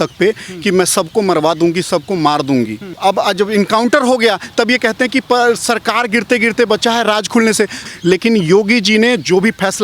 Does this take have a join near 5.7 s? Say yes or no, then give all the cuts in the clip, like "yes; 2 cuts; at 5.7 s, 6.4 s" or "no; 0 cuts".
no; 2 cuts; at 2.9 s, 7.8 s